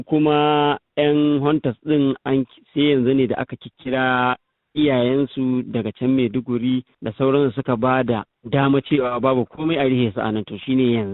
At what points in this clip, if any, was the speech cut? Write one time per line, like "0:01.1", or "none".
0:07.0
0:08.3